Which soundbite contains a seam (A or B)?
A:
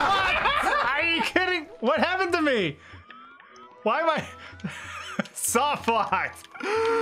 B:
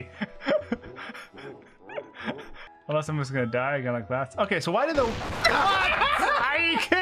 B